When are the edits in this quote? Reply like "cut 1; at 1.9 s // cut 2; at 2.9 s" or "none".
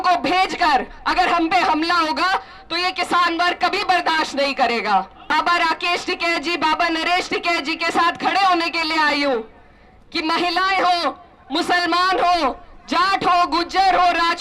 cut 1; at 5.2 s